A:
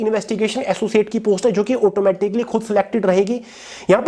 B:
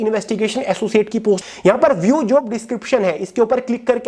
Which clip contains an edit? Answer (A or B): B